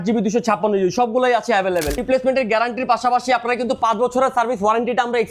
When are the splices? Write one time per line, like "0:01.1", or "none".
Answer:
0:02.0